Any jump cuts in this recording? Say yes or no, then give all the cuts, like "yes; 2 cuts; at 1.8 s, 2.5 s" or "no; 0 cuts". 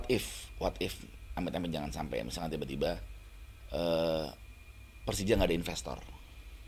no; 0 cuts